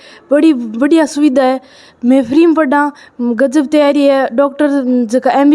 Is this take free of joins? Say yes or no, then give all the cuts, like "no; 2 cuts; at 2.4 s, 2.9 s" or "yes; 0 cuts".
yes; 0 cuts